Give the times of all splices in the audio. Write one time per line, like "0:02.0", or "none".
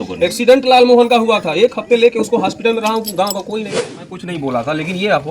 0:04.1